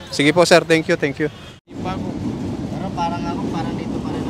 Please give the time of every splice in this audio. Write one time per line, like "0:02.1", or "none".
0:01.6